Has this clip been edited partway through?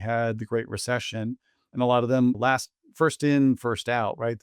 no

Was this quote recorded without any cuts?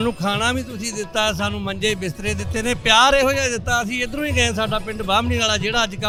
yes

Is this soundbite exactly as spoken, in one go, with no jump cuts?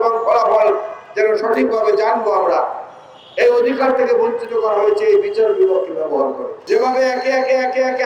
no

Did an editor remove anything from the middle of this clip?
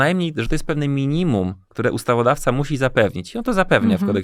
no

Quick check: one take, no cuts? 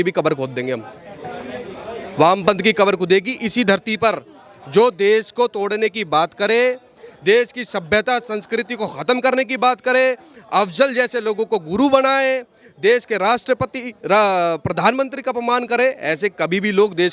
yes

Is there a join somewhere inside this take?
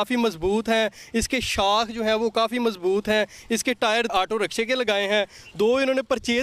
yes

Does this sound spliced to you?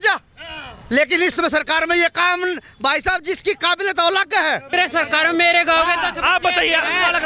yes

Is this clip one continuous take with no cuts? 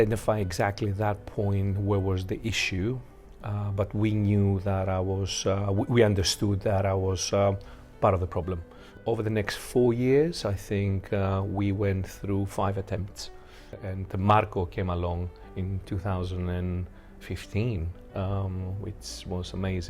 no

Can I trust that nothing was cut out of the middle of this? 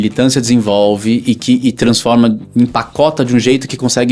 yes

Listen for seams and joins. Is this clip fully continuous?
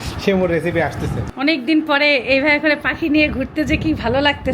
no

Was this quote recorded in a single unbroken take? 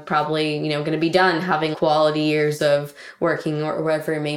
no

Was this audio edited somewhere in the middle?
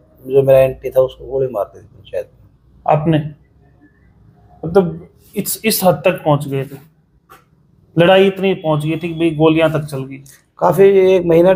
no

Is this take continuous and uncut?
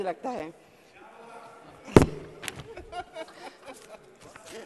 yes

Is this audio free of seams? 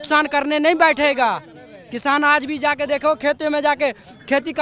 yes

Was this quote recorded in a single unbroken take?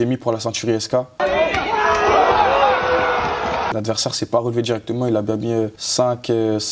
no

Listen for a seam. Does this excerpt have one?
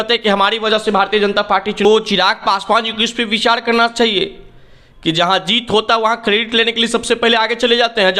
yes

